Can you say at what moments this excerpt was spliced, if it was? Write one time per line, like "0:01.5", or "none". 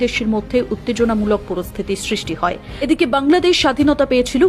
0:02.7